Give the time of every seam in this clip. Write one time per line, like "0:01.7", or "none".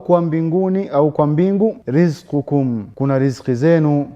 0:01.8
0:02.9